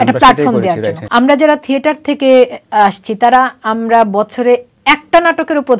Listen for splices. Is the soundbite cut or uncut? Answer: cut